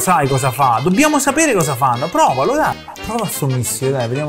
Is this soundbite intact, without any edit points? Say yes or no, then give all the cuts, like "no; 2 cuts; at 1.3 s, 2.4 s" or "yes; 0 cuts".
no; 1 cut; at 2.8 s